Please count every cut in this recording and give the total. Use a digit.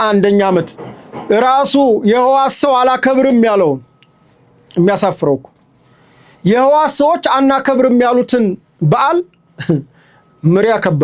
0